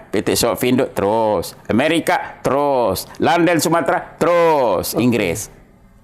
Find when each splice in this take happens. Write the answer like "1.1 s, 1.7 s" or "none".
none

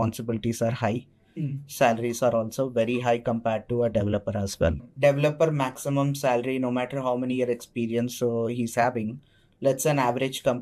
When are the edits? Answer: 4.9 s

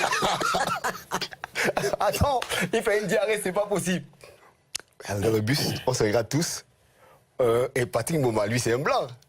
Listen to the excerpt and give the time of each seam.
4.5 s

